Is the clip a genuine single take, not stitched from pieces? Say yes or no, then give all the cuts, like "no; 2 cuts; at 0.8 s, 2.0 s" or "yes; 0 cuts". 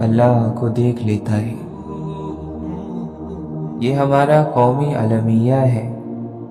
yes; 0 cuts